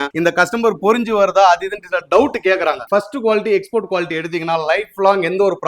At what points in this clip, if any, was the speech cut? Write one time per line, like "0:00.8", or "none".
0:02.8